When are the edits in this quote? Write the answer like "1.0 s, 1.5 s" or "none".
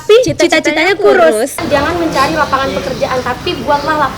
1.6 s